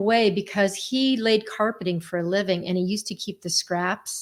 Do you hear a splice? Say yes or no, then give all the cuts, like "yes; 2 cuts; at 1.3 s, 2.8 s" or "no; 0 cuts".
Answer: no; 0 cuts